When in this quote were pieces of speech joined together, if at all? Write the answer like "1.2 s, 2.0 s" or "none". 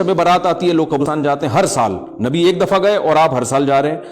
1.0 s